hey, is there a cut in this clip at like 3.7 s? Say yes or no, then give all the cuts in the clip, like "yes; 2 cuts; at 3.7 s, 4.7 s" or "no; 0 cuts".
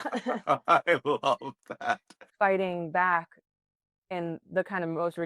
no; 1 cut; at 2.2 s